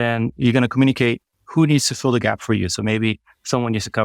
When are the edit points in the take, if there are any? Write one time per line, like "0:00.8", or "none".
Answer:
none

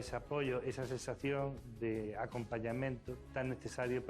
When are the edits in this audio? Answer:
0:02.0
0:03.2

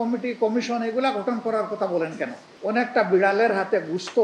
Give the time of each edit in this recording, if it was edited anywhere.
0:02.5

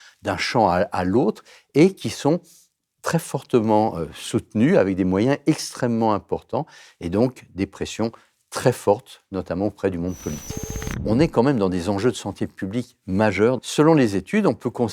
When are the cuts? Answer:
0:11.0
0:13.6

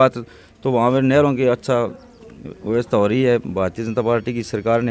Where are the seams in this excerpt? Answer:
none

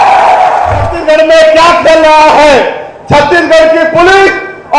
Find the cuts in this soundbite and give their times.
0:00.9

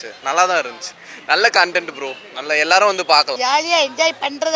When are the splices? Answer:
0:03.4

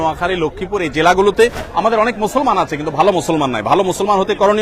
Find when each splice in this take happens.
0:01.6

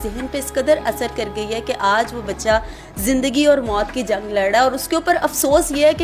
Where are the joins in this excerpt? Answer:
none

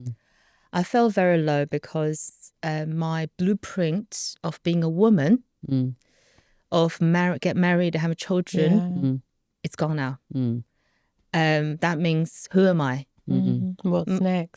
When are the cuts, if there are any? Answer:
none

